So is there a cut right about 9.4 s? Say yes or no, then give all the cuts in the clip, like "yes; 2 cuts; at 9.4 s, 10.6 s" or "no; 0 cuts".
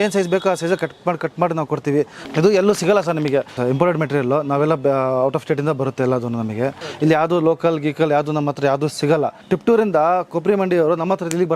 yes; 4 cuts; at 2.2 s, 3.5 s, 6.8 s, 9.4 s